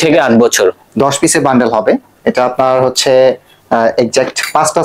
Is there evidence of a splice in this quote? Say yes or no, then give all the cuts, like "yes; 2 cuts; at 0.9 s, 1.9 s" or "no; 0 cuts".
no; 0 cuts